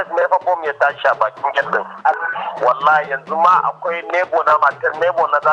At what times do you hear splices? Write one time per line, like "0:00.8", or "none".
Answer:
0:02.1

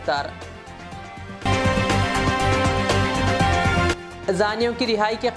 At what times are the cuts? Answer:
none

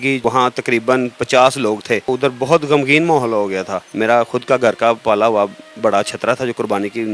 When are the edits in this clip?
0:02.0
0:03.9

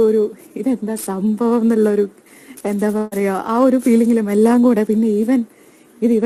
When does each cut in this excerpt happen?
none

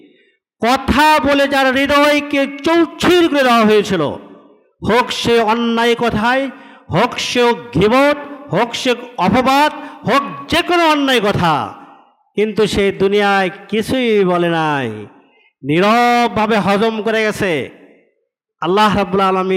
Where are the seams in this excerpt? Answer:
none

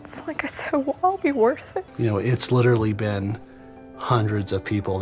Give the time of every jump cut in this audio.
0:01.9

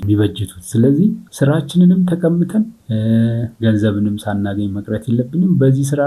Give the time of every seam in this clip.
0:01.2
0:02.8
0:03.5

